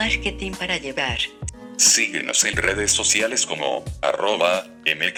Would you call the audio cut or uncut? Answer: uncut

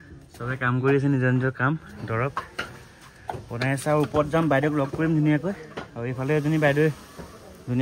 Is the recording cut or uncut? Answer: uncut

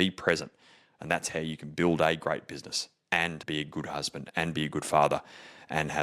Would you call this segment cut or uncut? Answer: cut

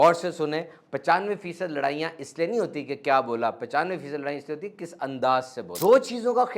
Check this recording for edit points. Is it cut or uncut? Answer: cut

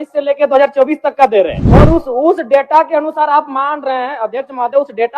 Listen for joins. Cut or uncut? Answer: cut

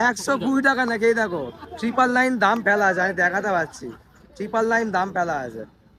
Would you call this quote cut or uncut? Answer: uncut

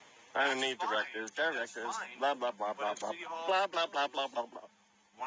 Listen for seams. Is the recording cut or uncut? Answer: uncut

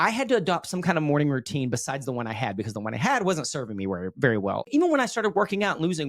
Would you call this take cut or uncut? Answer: cut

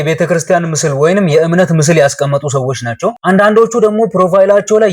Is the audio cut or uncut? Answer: uncut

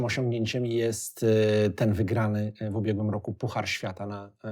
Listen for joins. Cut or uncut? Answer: uncut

